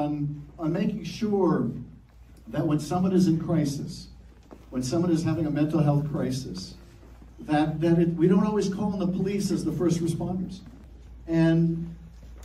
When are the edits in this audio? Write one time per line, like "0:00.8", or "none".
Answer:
0:01.6
0:06.6
0:11.6